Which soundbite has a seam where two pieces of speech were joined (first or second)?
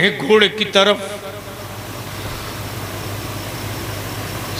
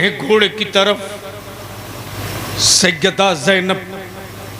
second